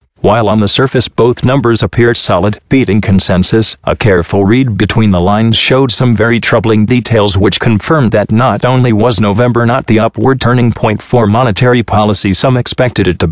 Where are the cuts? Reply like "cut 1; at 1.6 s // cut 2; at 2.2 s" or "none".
none